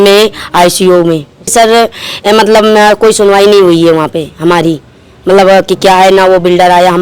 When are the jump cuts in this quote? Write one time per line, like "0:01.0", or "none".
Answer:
0:01.5